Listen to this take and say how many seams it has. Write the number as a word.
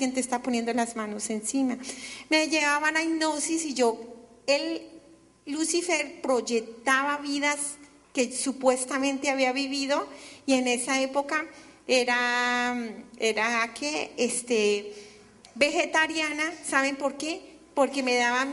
one